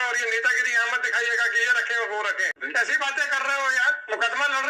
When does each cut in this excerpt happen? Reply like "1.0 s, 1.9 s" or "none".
2.6 s